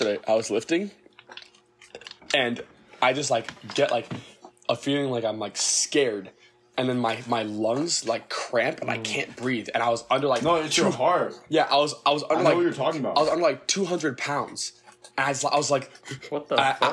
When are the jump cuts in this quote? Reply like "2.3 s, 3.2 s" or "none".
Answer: none

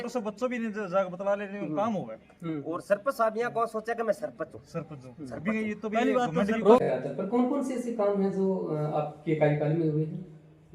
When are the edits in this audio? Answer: 6.8 s

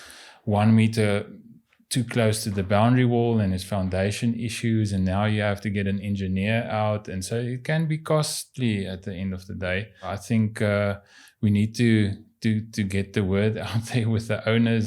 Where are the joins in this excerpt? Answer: 10.2 s

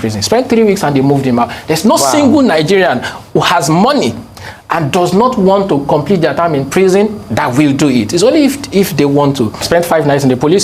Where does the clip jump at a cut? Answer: 9.6 s

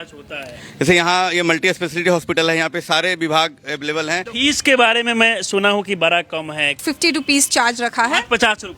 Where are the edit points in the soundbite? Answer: 4.3 s, 6.8 s

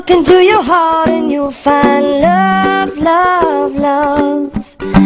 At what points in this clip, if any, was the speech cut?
none

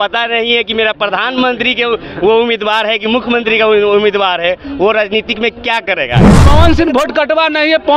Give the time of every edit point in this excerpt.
6.3 s

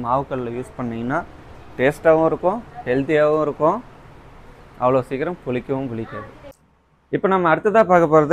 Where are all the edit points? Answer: none

